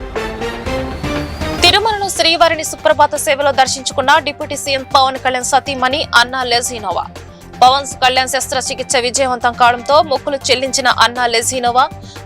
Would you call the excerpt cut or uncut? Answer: uncut